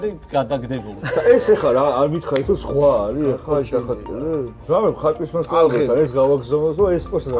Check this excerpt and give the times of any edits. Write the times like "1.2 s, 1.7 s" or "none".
0.9 s, 4.6 s